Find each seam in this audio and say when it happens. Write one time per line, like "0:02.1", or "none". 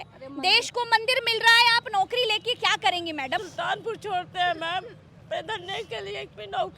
0:03.4